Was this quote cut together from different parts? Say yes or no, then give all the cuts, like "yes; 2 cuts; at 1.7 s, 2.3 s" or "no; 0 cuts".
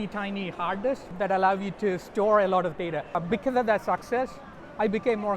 yes; 2 cuts; at 1.1 s, 3.2 s